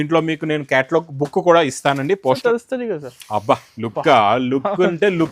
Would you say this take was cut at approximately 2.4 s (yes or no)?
yes